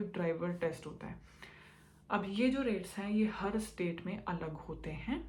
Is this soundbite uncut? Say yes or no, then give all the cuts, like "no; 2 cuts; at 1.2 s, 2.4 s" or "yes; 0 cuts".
yes; 0 cuts